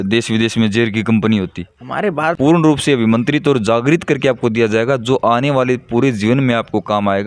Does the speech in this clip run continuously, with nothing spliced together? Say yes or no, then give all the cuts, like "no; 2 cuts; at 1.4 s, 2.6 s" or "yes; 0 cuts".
no; 1 cut; at 2.4 s